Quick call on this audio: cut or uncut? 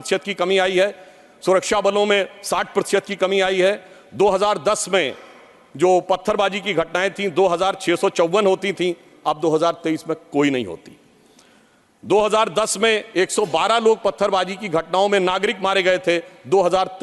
uncut